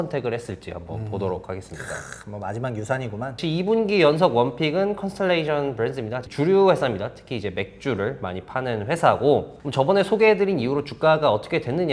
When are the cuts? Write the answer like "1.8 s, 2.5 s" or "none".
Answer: 3.4 s, 6.2 s, 9.6 s